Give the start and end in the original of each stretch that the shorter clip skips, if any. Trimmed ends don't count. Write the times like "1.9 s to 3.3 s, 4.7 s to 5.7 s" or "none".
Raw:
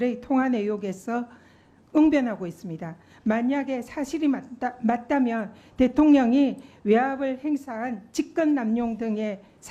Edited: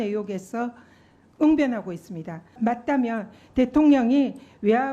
3.1 s to 4.7 s